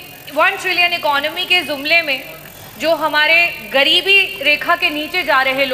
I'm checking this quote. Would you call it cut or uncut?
uncut